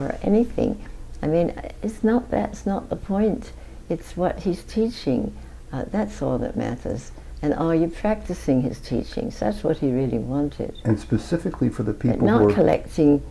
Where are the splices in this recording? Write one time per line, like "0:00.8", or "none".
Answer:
none